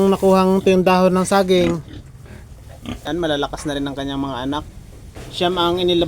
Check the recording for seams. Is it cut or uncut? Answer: cut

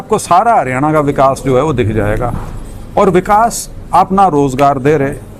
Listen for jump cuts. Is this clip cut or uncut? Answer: uncut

